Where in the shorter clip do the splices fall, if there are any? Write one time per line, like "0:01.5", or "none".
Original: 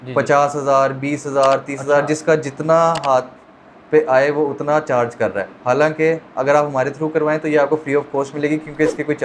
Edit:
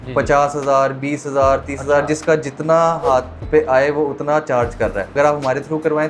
0:03.4
0:05.1

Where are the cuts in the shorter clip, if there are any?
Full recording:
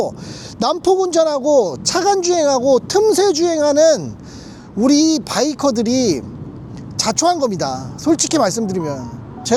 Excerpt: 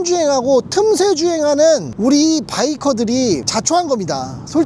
0:01.9
0:03.5

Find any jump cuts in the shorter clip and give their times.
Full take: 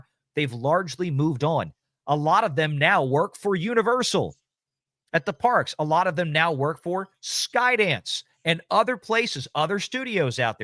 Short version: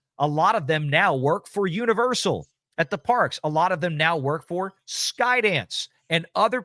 0:02.6

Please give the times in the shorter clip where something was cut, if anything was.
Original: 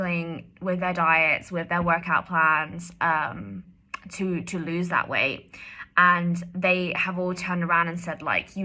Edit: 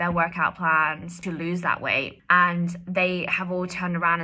0:01.2
0:02.1

